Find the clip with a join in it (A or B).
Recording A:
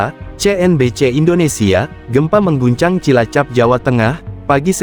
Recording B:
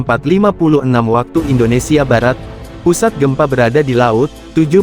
B